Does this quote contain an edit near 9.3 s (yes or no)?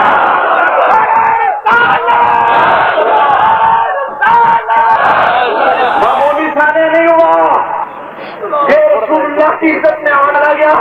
no